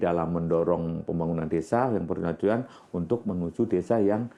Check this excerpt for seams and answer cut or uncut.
uncut